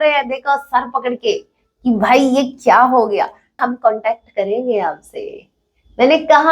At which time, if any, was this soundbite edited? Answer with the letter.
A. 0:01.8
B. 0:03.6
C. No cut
B